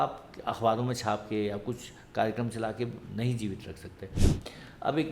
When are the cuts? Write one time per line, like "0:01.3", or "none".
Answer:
0:04.2

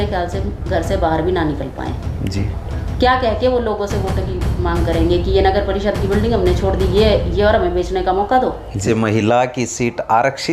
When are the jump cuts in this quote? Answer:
0:08.8

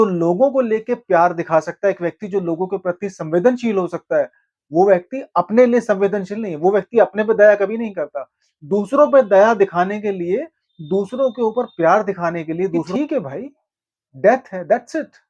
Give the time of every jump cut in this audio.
0:12.9

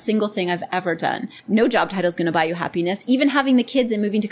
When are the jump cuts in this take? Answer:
0:01.3

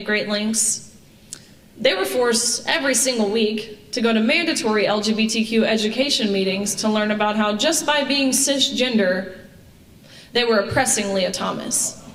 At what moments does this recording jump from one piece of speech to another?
none

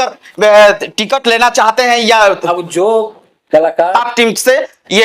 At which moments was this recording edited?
0:03.9

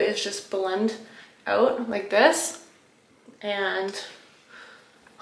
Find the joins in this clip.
none

